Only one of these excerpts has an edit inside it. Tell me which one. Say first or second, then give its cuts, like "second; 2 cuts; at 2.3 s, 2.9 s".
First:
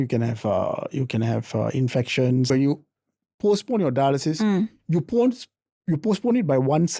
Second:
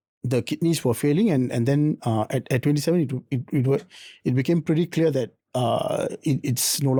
first; 1 cut; at 2.5 s